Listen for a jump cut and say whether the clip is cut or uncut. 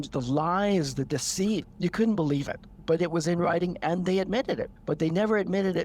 cut